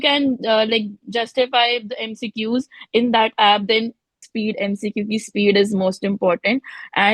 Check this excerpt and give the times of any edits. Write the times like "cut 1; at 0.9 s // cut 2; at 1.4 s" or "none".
cut 1; at 4.2 s